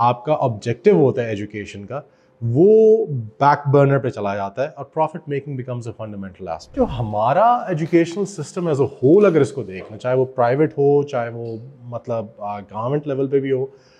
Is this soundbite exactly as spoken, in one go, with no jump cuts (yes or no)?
no